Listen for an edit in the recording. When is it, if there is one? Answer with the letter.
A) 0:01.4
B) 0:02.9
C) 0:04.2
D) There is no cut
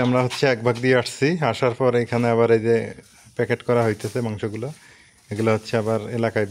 D